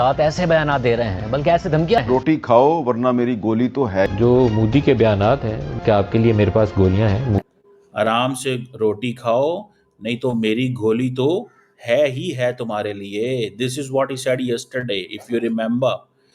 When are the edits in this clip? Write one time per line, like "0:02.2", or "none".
none